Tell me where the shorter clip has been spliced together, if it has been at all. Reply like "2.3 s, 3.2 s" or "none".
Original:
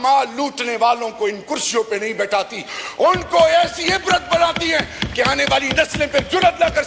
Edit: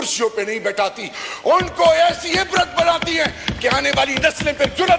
none